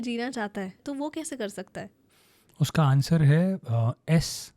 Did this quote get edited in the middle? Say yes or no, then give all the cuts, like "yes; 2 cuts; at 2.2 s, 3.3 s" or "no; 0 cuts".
yes; 2 cuts; at 0.8 s, 2.0 s